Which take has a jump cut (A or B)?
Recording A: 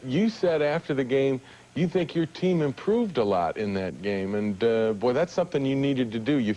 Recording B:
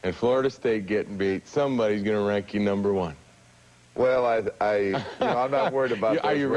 B